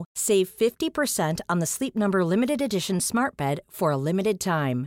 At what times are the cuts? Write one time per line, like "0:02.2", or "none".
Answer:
none